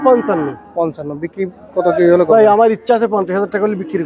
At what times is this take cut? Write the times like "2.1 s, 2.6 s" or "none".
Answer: none